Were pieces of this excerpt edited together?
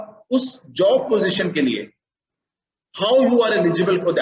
no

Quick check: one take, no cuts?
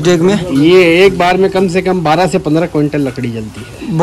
yes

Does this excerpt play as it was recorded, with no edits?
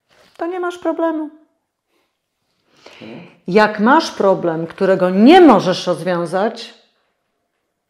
yes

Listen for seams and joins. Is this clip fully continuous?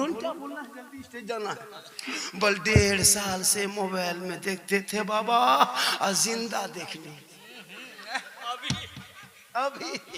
yes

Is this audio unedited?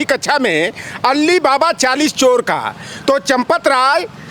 yes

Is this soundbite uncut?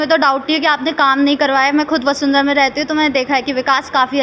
yes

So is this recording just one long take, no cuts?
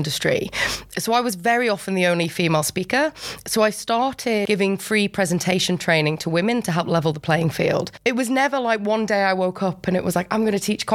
no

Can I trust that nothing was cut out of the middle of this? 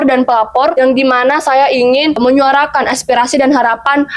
no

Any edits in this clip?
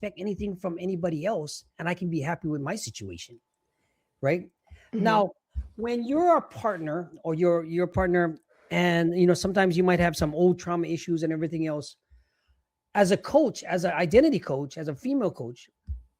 no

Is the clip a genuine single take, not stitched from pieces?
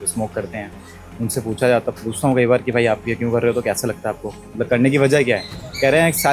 yes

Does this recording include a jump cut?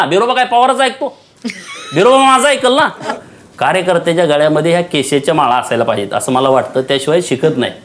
yes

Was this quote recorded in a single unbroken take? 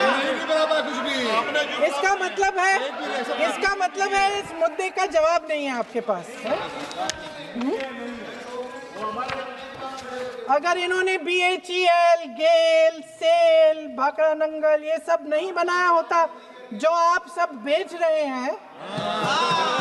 yes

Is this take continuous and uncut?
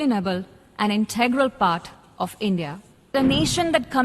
no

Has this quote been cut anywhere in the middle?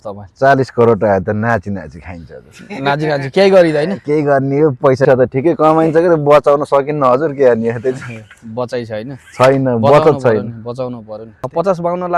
yes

